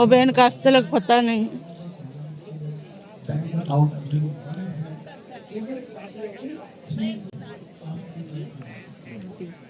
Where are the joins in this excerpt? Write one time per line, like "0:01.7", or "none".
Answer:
none